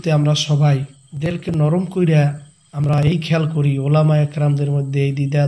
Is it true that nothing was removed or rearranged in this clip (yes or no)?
no